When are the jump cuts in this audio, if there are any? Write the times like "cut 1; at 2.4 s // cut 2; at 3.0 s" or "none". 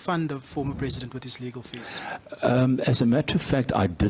none